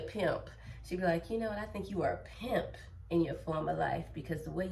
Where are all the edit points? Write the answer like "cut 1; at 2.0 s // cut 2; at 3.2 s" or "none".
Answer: none